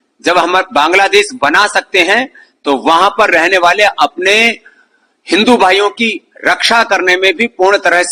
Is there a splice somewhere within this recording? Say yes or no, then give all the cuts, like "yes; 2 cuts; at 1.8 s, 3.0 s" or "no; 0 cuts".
no; 0 cuts